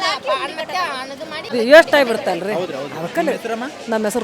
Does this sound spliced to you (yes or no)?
yes